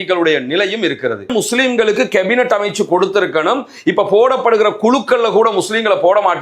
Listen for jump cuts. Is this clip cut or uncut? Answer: cut